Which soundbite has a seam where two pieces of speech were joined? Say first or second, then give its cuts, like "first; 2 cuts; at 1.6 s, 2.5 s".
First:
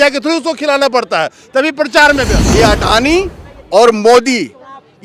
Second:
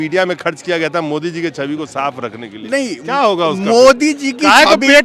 first; 1 cut; at 2.4 s